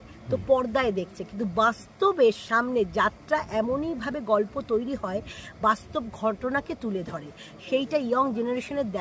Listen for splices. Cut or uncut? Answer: uncut